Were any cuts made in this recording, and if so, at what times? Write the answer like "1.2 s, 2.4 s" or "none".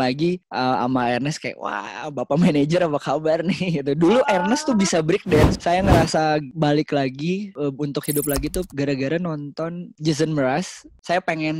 none